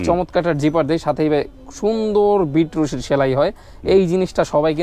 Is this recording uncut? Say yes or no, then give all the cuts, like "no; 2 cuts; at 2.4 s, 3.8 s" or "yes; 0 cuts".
yes; 0 cuts